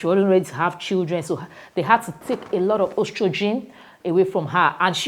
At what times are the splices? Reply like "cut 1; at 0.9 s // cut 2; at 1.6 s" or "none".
cut 1; at 2.1 s